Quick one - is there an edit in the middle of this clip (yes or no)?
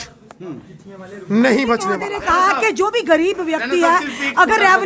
yes